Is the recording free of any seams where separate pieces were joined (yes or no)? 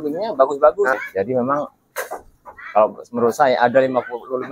no